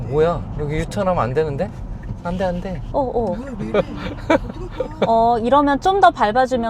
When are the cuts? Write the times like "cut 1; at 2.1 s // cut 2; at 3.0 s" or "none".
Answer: none